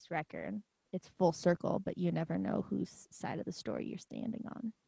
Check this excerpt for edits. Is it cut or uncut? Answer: uncut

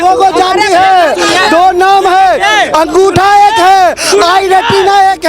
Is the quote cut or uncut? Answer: uncut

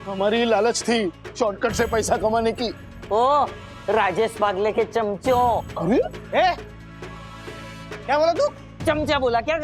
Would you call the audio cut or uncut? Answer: uncut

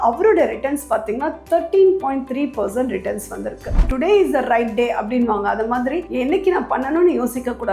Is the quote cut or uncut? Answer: cut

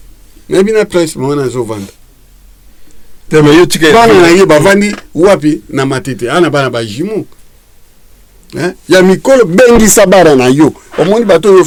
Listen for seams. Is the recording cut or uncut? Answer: uncut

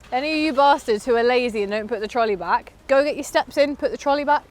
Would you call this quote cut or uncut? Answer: cut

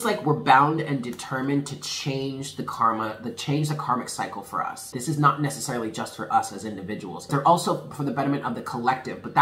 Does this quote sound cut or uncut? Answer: cut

